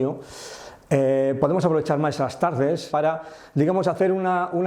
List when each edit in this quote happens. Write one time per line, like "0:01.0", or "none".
0:02.9